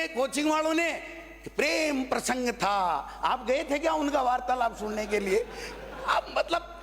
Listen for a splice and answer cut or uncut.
uncut